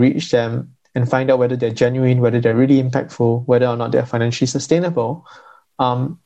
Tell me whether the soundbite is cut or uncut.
uncut